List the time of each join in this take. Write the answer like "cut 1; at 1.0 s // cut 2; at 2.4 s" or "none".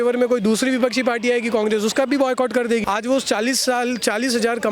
cut 1; at 2.8 s